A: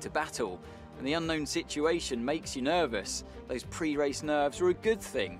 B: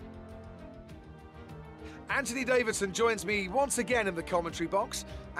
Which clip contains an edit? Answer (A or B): B